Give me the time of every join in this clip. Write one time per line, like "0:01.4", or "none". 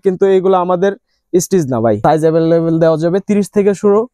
0:02.0